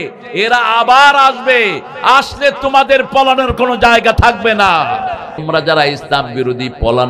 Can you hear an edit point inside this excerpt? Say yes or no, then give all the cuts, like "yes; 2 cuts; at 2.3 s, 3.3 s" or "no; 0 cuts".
yes; 1 cut; at 5.4 s